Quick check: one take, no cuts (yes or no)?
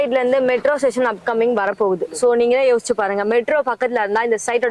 yes